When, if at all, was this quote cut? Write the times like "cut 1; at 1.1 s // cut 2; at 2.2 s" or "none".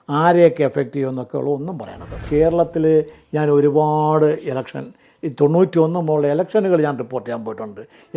cut 1; at 2.3 s